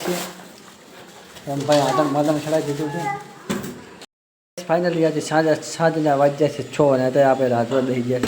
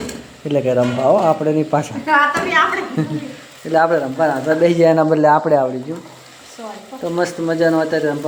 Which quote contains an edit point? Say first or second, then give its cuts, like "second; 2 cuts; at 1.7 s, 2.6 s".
first; 1 cut; at 3.9 s